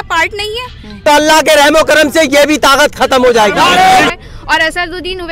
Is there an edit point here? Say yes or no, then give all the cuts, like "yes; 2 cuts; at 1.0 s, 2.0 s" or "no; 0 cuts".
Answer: yes; 2 cuts; at 0.9 s, 4.1 s